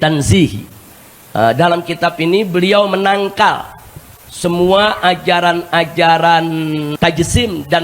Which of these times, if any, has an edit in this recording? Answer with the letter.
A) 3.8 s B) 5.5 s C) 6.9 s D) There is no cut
C